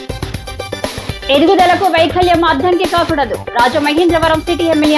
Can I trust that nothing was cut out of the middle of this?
yes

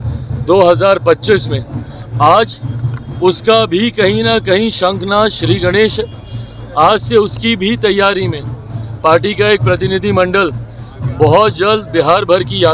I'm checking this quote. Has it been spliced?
no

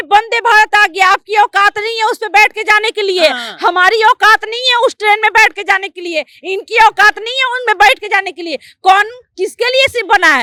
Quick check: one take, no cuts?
yes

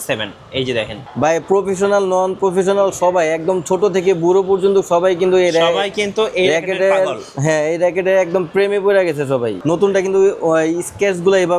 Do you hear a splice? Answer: yes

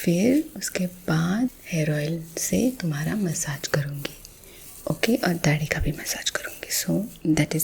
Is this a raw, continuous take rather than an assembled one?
no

